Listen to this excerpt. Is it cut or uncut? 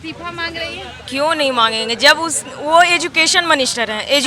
uncut